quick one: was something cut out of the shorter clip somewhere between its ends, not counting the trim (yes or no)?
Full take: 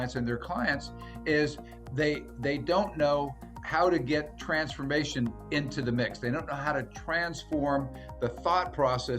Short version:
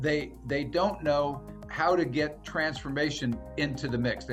no